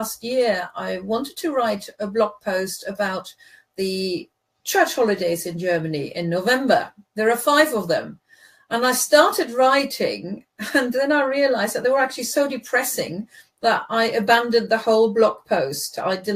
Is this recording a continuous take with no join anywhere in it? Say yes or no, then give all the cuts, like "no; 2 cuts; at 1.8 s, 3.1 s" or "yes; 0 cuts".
no; 1 cut; at 6.0 s